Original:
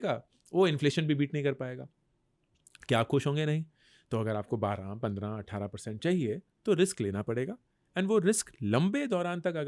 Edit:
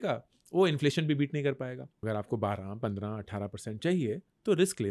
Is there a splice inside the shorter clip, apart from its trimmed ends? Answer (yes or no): yes